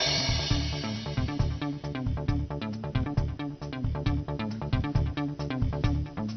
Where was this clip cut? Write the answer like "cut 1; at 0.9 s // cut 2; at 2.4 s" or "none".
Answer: cut 1; at 1.3 s